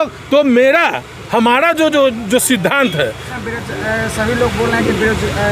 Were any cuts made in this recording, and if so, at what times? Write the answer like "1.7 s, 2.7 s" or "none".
3.3 s